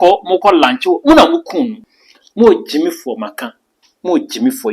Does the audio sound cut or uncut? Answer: cut